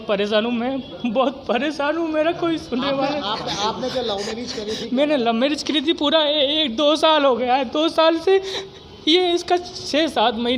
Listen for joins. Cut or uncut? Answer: cut